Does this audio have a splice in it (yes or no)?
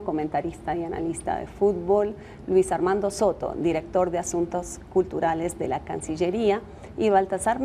no